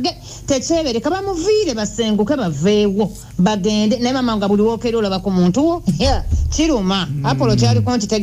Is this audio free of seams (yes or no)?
yes